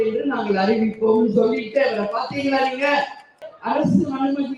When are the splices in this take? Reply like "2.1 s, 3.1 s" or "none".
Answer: 3.5 s